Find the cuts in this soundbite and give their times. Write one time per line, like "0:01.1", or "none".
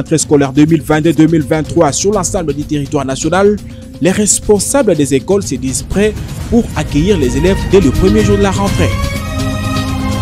0:08.9